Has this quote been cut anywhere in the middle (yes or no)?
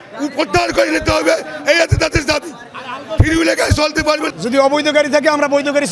yes